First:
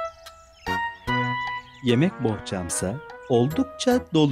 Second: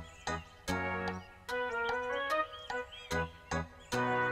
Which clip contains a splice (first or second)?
first